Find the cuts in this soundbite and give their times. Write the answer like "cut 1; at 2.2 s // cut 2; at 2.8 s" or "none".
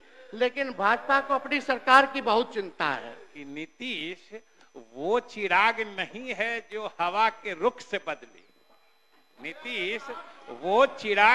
cut 1; at 3.3 s